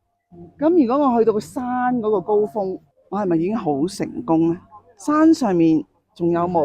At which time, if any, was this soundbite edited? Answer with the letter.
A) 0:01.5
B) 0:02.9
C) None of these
B